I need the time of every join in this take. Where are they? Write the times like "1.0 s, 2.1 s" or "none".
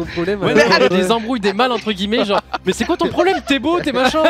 0.9 s